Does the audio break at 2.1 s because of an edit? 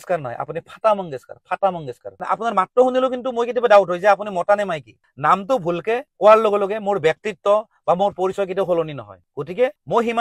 yes; 2 cuts; at 2.1 s, 5.1 s

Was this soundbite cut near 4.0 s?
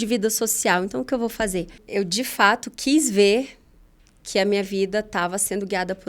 no; 1 cut; at 1.8 s

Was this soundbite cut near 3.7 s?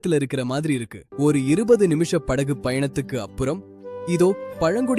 no; 1 cut; at 1.0 s

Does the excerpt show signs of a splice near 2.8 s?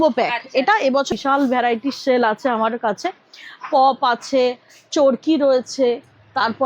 no; 1 cut; at 1.1 s

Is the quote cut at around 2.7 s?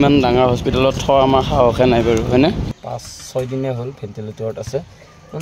yes; 1 cut; at 2.7 s

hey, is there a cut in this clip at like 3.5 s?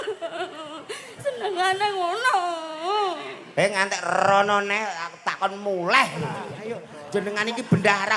no; 1 cut; at 6.7 s

